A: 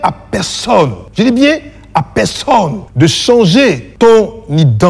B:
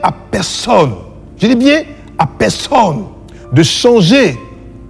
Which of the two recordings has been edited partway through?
A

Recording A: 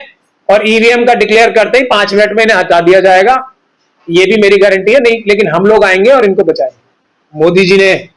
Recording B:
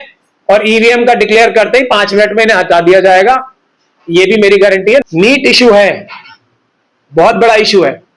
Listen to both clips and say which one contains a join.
B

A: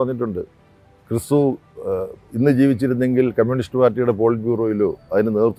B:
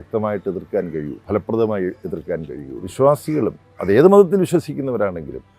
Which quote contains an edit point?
B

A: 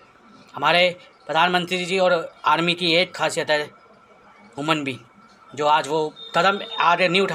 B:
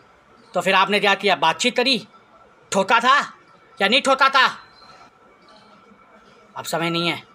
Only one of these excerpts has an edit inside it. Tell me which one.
B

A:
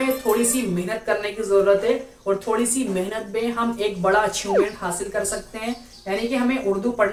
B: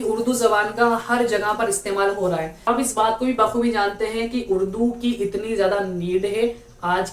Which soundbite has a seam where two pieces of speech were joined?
B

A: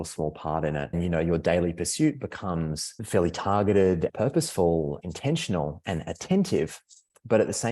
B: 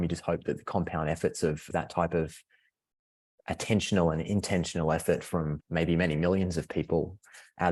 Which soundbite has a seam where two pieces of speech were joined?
A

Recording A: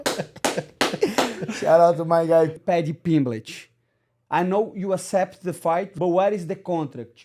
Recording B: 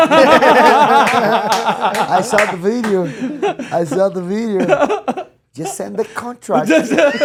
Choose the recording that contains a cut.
A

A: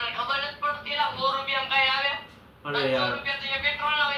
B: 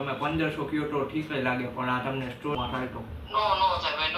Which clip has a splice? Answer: B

